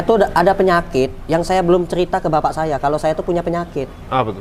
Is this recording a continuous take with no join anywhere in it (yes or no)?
yes